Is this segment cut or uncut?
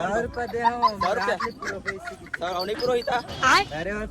uncut